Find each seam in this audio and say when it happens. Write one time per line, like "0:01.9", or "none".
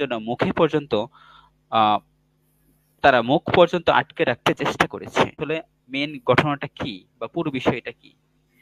0:05.4